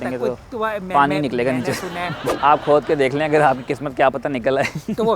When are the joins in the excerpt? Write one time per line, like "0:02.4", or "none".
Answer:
0:02.2

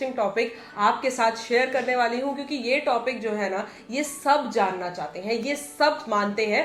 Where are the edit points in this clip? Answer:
none

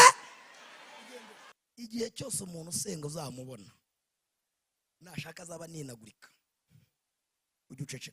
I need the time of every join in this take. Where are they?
0:01.5

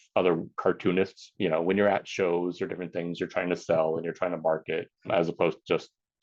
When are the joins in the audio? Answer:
0:01.2
0:05.1

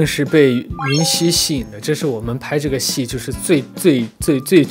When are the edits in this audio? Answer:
none

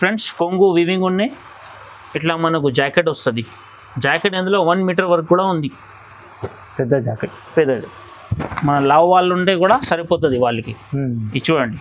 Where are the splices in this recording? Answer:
none

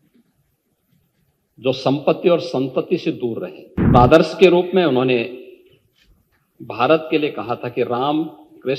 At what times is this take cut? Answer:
0:03.9

